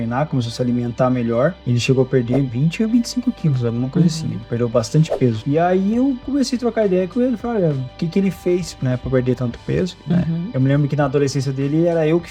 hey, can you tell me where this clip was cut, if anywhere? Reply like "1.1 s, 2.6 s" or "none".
none